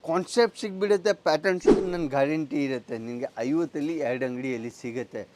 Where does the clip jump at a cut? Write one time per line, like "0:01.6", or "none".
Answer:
0:01.6